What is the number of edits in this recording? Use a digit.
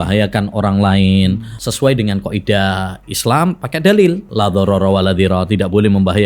2